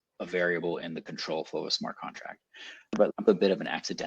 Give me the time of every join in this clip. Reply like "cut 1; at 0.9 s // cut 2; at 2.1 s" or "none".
cut 1; at 3.0 s